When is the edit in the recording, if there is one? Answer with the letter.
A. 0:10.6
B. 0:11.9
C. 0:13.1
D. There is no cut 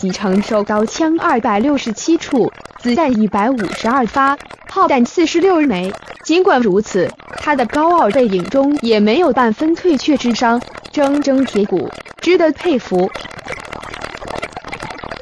C